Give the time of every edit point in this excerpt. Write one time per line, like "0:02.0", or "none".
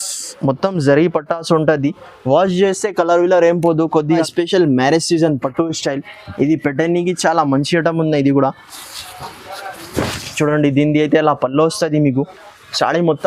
0:04.2